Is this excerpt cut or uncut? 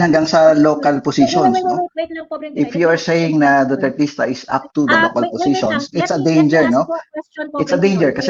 uncut